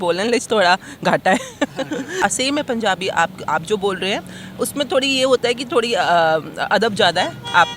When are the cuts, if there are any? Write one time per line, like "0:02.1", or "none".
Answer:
0:02.2